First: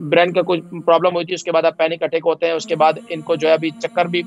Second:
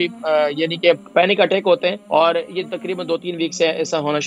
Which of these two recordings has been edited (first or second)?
second